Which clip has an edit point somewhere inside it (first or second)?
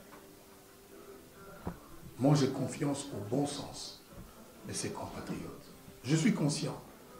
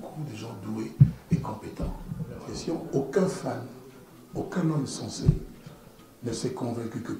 second